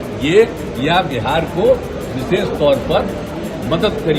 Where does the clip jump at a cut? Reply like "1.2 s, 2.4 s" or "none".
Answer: none